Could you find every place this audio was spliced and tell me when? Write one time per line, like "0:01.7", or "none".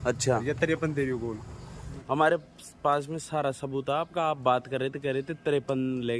0:01.9